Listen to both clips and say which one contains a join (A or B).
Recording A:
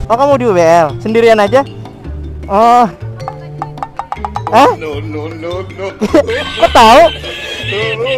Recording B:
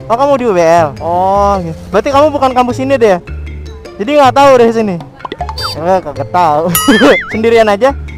A